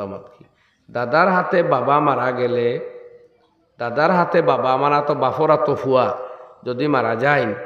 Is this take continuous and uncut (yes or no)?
yes